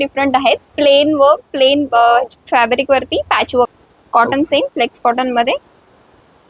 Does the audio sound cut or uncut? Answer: cut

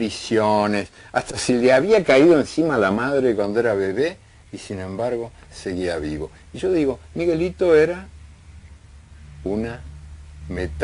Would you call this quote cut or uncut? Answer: uncut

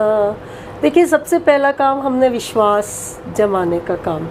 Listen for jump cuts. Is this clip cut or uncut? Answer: uncut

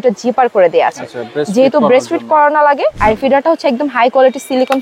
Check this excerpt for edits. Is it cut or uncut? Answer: cut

